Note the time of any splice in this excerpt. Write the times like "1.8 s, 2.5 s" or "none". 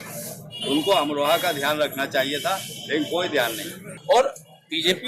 3.9 s